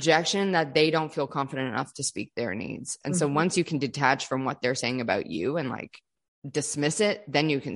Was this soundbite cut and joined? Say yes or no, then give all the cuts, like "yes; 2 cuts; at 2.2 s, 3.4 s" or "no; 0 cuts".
no; 0 cuts